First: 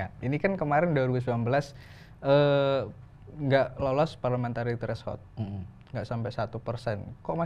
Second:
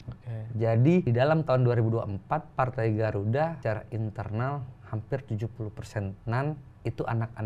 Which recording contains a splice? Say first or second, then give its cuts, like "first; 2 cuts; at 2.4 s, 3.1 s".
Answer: second; 3 cuts; at 1.1 s, 3.6 s, 6.2 s